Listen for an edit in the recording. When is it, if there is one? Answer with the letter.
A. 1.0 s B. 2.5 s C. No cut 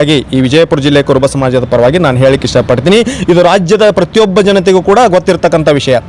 C